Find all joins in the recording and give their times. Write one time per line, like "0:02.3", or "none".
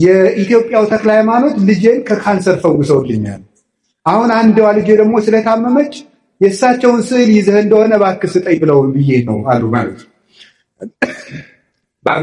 none